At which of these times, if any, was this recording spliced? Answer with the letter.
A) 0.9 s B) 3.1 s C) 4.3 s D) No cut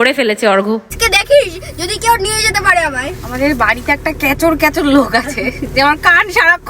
A